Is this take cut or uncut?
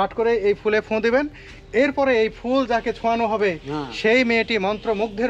uncut